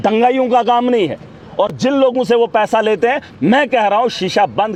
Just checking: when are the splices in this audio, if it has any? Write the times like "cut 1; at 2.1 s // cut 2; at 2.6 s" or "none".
none